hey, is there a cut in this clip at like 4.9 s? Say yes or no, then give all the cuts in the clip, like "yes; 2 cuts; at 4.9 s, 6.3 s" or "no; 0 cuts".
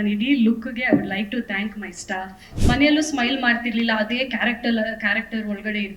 no; 1 cut; at 2.4 s